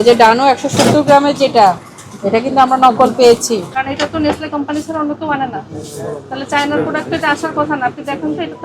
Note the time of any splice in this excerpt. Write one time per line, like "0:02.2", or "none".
0:03.7

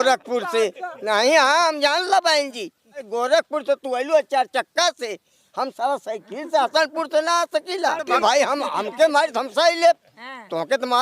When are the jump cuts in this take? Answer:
0:03.1
0:08.1

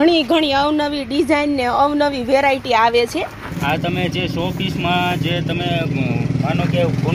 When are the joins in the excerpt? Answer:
0:03.5

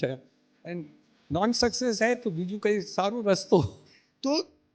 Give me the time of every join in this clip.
0:03.8

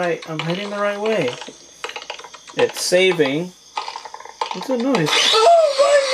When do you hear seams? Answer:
none

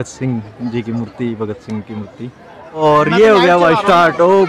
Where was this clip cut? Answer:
0:02.8

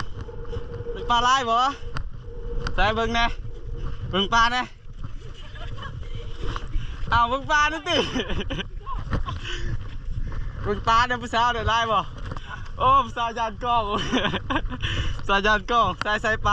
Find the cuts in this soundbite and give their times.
none

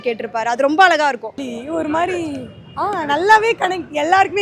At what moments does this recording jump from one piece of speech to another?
0:01.5

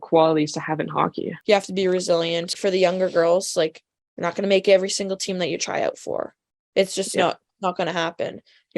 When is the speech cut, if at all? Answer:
0:01.3
0:02.5

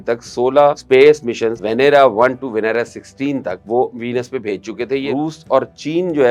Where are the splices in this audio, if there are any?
0:00.8
0:01.5
0:03.6
0:05.1

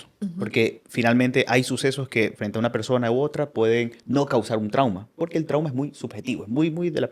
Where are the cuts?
none

